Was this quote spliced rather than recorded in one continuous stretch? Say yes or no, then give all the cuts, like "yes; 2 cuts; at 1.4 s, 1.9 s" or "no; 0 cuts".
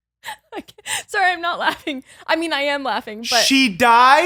no; 0 cuts